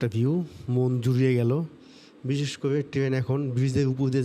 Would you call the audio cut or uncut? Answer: uncut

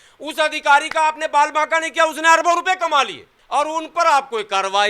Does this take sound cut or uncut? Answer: cut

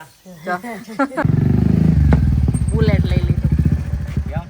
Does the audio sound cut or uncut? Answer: cut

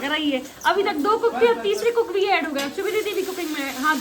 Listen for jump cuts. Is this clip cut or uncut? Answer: uncut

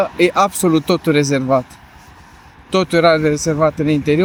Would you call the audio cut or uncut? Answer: uncut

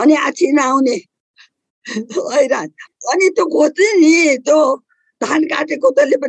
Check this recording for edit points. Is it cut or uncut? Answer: cut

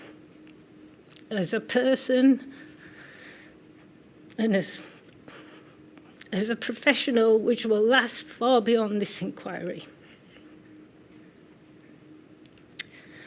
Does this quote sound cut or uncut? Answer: uncut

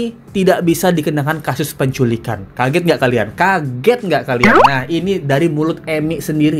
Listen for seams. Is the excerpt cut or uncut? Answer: uncut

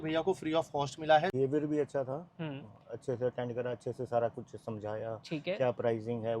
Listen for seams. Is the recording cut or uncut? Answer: cut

